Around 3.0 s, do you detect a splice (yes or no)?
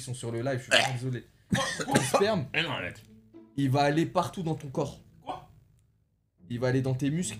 no